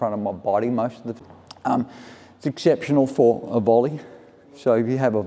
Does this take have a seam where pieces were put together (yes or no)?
yes